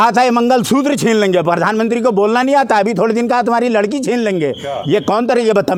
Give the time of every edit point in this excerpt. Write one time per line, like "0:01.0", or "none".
none